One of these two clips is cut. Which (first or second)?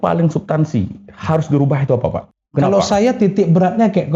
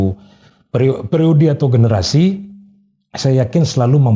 first